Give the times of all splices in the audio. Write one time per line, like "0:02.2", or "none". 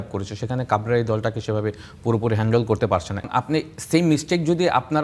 0:03.3